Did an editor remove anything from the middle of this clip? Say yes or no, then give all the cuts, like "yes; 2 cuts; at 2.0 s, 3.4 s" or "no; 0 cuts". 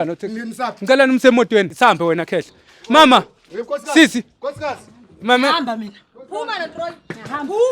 yes; 1 cut; at 1.7 s